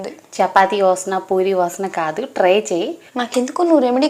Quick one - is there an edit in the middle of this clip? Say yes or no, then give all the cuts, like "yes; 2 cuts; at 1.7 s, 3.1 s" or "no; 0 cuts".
yes; 1 cut; at 3.0 s